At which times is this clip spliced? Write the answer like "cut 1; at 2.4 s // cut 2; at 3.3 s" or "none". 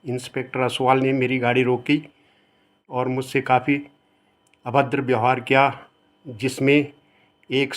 cut 1; at 2.7 s